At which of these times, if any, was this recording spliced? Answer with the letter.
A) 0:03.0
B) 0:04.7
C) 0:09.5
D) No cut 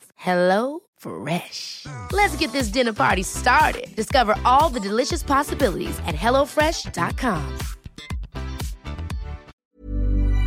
C